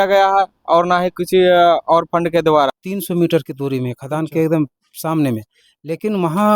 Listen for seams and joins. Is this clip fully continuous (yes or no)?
no